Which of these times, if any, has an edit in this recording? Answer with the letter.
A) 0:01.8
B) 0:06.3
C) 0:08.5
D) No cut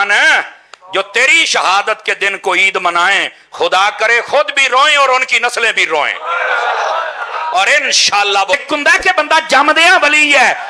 C